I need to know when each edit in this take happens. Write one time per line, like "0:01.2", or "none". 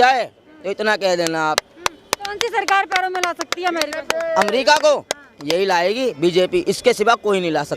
none